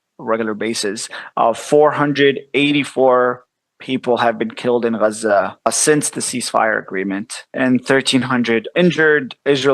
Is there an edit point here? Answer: yes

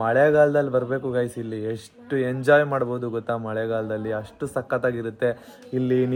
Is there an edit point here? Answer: no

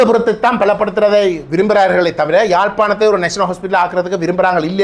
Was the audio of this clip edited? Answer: no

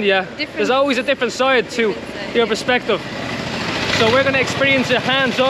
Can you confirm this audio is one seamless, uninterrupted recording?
yes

